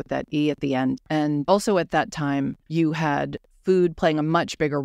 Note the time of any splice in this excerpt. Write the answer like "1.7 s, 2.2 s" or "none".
1.2 s, 2.6 s, 3.4 s